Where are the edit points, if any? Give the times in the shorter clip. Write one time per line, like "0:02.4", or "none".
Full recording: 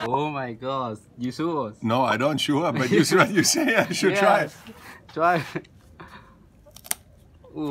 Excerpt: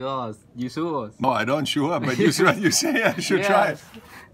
0:01.2